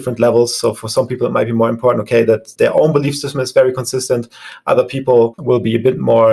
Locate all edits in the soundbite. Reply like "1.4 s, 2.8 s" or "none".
0.9 s, 5.4 s